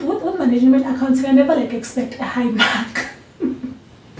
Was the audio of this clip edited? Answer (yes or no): no